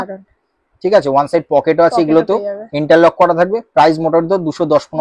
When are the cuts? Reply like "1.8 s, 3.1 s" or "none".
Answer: none